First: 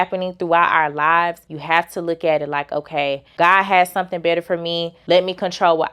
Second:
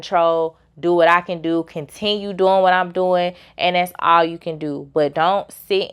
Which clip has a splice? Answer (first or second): first